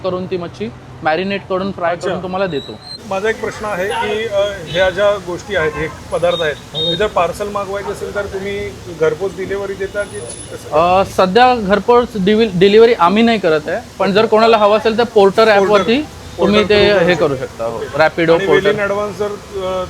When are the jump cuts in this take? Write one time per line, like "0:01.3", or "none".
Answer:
0:02.9